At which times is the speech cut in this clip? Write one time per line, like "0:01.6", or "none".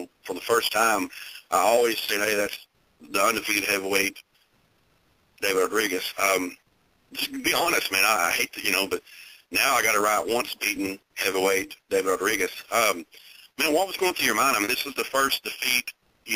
none